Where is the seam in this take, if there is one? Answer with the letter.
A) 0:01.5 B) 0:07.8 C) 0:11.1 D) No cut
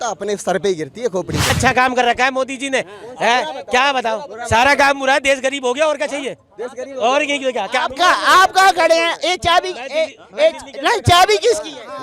A